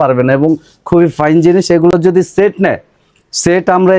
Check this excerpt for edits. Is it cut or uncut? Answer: uncut